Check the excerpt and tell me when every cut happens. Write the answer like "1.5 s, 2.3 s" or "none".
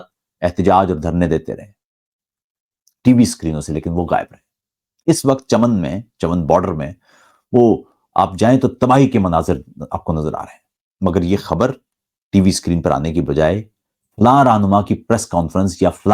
none